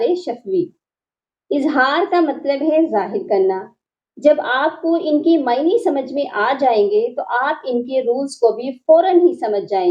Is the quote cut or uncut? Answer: uncut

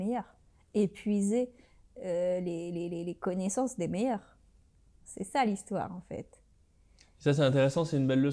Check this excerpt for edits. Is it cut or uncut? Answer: uncut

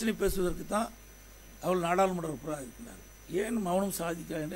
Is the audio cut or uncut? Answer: uncut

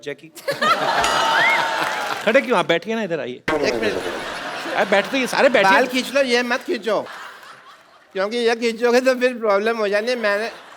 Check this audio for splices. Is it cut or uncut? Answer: cut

